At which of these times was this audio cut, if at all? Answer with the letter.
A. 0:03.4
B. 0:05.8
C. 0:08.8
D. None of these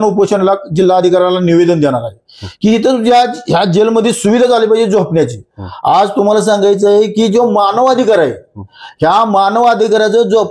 D